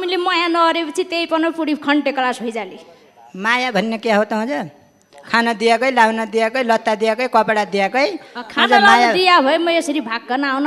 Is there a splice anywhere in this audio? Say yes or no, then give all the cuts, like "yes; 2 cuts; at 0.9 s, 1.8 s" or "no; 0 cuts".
no; 0 cuts